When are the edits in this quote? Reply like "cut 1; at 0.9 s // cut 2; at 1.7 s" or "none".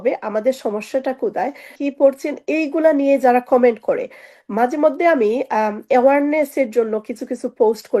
cut 1; at 1.8 s